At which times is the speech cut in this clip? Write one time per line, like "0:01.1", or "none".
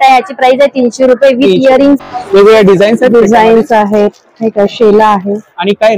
0:02.0